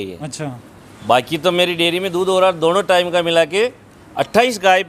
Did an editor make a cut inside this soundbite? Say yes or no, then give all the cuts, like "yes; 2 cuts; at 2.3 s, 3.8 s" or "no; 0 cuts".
no; 0 cuts